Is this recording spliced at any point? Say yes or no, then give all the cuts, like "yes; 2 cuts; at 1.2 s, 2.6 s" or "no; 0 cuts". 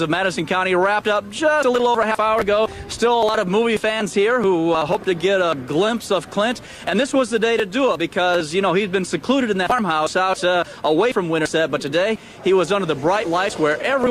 yes; 1 cut; at 2.8 s